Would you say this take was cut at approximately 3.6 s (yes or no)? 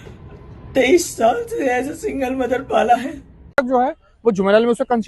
yes